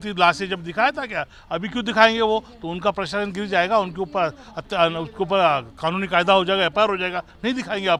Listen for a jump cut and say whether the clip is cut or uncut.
uncut